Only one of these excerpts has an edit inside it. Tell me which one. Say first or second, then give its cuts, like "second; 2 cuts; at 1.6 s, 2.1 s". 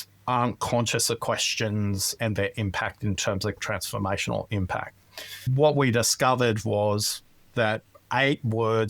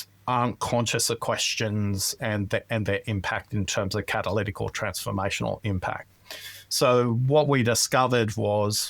first; 3 cuts; at 2.1 s, 3.6 s, 5.5 s